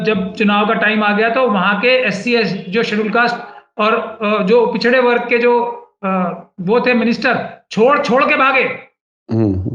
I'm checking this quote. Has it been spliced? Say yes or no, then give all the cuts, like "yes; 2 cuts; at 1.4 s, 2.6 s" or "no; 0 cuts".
no; 0 cuts